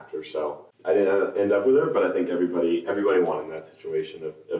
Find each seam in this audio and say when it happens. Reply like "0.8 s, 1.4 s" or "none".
none